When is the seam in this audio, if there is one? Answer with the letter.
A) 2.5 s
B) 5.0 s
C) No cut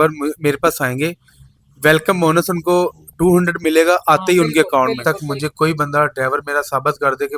B